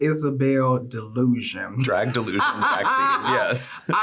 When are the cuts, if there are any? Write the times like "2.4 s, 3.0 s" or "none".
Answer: none